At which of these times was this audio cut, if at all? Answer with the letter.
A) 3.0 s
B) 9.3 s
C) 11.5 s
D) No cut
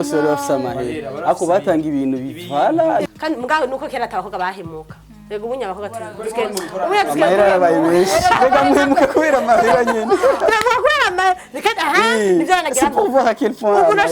A